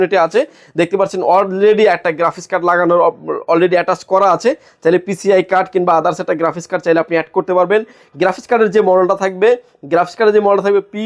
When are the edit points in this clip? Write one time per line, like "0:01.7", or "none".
none

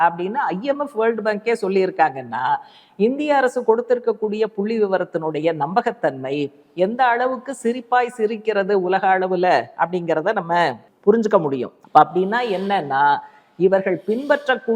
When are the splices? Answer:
0:10.9
0:11.8

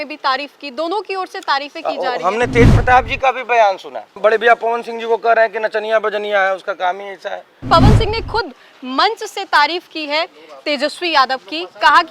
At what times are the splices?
0:07.6

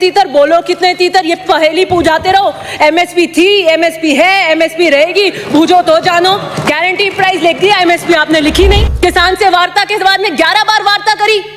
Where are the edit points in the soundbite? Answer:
0:08.9

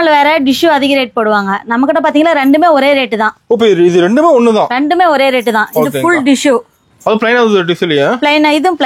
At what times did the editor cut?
none

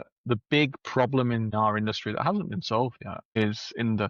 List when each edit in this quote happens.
0:01.5
0:03.4

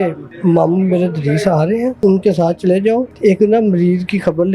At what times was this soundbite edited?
0:02.0

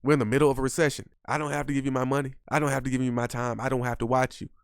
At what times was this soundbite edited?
0:01.1

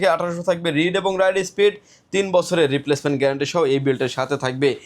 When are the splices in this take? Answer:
none

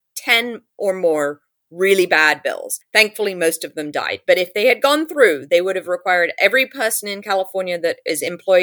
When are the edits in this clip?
0:02.7

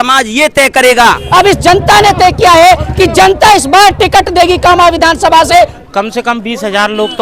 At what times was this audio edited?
0:01.2
0:05.8

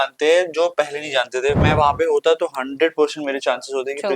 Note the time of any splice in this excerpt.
0:01.6

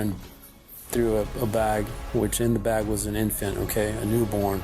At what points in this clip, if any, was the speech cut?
none

